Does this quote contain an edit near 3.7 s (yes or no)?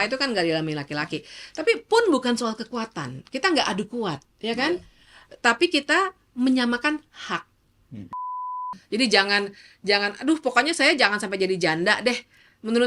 no